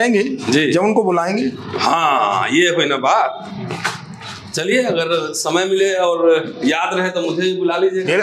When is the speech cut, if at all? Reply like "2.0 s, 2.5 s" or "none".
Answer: none